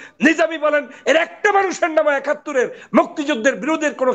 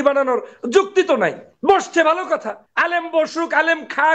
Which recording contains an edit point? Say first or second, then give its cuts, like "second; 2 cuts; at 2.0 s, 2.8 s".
second; 2 cuts; at 1.5 s, 2.6 s